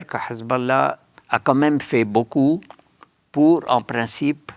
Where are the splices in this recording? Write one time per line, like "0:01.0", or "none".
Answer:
0:01.1